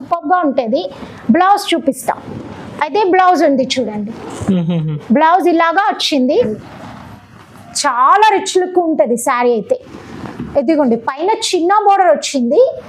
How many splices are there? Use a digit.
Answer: 1